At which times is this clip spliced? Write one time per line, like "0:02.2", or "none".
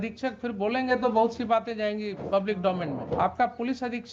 0:02.2
0:03.2